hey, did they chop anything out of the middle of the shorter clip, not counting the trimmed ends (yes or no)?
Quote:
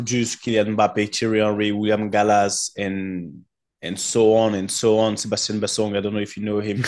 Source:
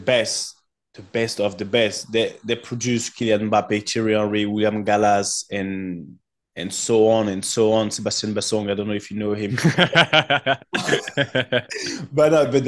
no